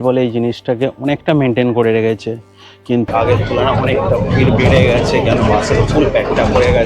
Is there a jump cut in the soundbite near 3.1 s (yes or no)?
yes